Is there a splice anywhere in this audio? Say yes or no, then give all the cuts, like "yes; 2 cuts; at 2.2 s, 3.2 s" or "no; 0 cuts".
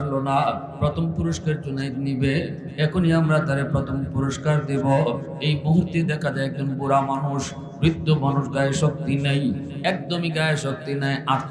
no; 0 cuts